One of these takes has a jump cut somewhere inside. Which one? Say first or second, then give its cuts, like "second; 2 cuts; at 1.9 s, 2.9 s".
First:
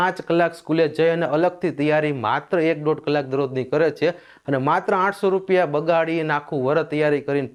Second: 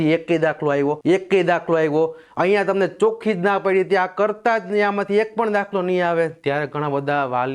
second; 1 cut; at 1.0 s